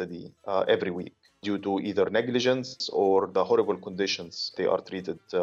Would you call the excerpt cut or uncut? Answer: cut